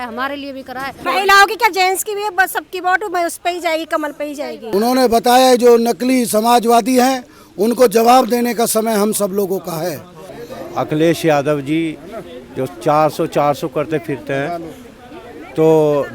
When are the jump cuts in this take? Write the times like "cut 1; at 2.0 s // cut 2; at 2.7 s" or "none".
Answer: cut 1; at 1.1 s // cut 2; at 4.7 s // cut 3; at 10.3 s